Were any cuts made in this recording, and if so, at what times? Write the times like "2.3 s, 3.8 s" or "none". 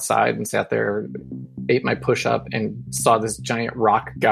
none